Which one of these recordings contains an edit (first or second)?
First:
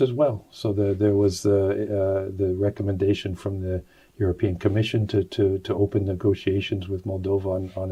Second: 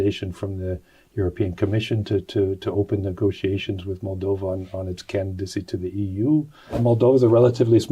second